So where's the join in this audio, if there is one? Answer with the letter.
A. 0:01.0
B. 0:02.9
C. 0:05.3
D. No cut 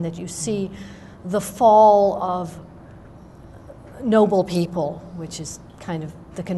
D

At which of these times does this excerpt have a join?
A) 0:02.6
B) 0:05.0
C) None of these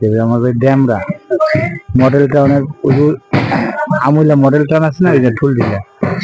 C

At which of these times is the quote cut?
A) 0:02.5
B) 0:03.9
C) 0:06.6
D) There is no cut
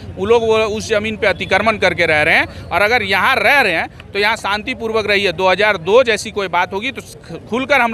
D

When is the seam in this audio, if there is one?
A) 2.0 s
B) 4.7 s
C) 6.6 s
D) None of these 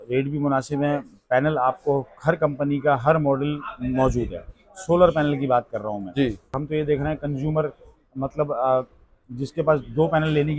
C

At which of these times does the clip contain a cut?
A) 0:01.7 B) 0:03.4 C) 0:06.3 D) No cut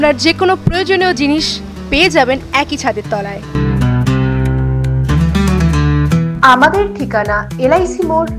D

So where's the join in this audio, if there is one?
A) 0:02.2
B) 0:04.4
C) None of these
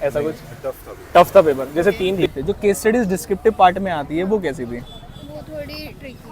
A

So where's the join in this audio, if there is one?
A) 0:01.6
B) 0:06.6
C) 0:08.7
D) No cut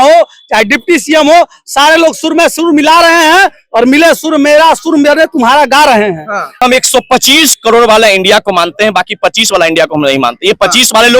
B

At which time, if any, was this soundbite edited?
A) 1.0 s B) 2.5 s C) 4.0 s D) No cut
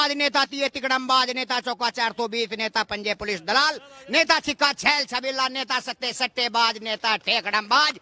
D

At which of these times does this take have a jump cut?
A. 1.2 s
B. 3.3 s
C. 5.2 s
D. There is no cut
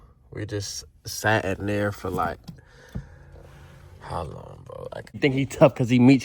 C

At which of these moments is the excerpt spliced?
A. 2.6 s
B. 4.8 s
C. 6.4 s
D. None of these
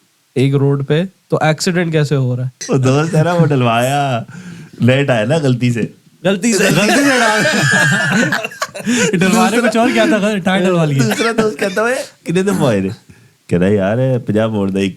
A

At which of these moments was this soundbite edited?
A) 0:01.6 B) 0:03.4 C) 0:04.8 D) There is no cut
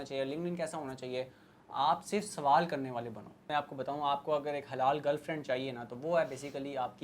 B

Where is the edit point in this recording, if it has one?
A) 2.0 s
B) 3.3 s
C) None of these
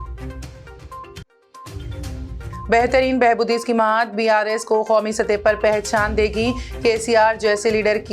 A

